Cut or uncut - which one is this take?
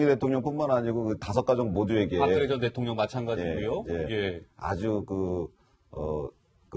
cut